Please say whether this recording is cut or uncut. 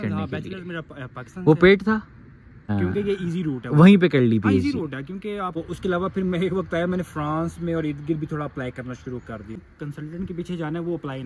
cut